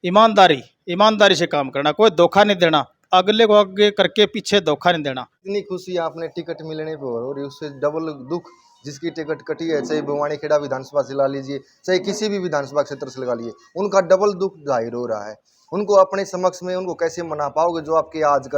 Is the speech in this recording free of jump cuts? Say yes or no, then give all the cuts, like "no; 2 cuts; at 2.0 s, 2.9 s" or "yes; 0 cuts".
no; 1 cut; at 5.4 s